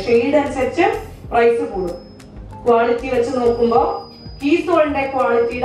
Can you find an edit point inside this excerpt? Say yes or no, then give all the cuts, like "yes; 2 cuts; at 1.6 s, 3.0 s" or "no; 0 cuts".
no; 0 cuts